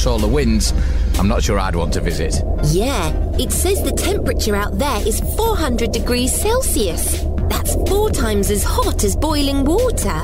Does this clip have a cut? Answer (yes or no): no